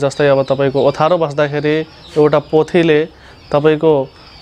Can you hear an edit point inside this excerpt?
no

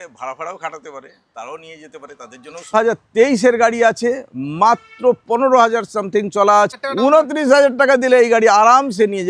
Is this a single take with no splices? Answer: no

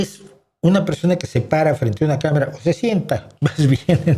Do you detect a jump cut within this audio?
no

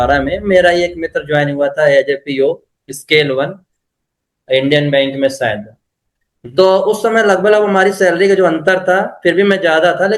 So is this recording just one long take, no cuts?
yes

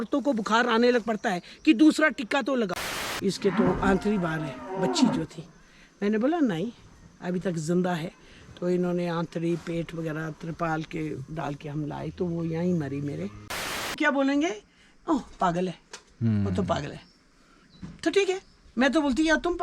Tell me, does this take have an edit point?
yes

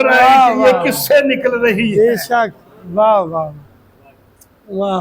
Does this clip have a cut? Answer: no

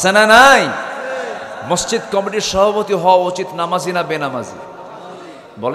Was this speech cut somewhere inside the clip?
no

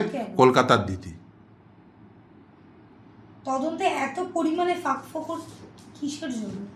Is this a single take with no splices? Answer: yes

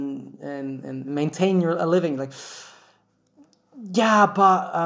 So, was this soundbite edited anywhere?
no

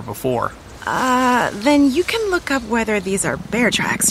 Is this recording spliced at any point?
no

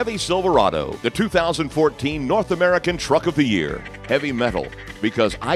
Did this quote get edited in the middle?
yes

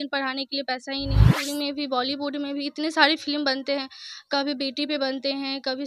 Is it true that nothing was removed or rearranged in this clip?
no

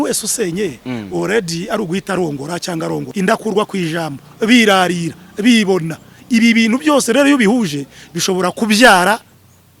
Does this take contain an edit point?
yes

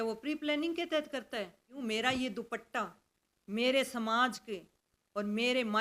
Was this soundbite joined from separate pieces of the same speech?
yes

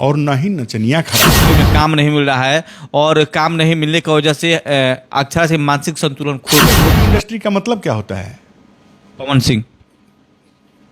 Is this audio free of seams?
no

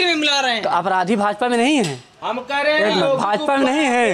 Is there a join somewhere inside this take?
no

